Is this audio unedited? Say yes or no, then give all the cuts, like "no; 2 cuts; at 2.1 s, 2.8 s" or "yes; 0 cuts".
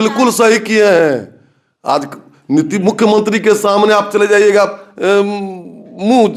yes; 0 cuts